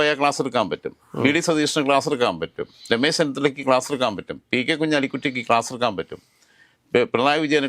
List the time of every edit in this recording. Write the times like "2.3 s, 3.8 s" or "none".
none